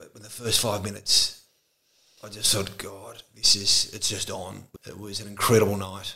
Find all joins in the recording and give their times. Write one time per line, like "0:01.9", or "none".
0:04.7